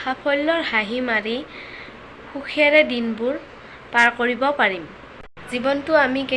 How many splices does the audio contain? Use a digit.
0